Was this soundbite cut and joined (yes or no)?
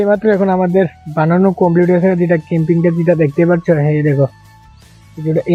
no